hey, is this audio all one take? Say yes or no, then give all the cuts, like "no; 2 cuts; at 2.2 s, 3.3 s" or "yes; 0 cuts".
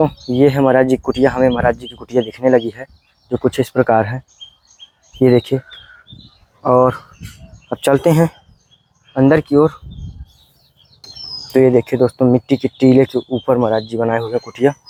yes; 0 cuts